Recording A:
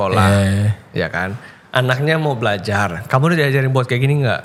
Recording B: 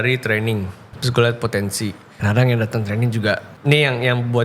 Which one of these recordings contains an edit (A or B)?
B